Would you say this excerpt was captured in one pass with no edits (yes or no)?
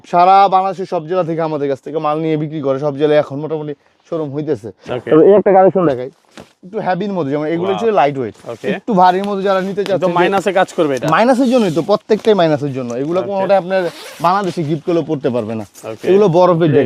yes